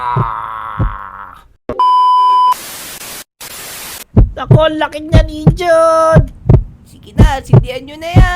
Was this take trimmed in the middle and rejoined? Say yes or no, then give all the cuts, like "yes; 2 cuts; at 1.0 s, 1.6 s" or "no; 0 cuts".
yes; 2 cuts; at 1.4 s, 4.1 s